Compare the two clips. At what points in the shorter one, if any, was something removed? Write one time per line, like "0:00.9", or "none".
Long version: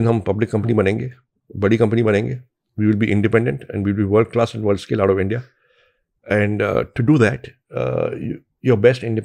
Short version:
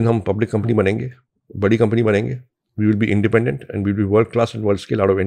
none